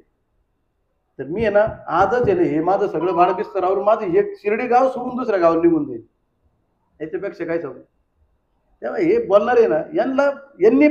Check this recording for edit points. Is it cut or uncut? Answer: uncut